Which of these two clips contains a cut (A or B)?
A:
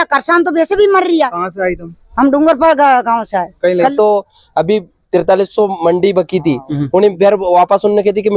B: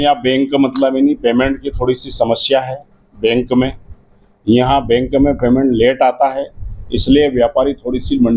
A